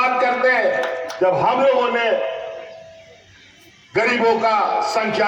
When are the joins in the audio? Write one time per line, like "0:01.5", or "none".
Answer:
none